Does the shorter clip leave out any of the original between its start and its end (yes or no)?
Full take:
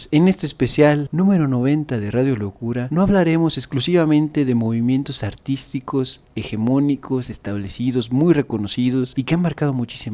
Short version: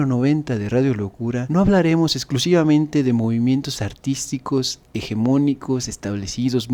no